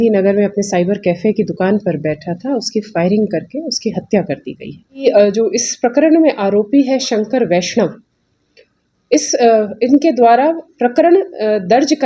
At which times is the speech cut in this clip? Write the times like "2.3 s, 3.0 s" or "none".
5.0 s